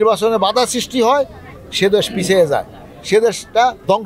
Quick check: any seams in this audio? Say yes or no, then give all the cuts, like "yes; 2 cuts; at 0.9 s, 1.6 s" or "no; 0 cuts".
no; 0 cuts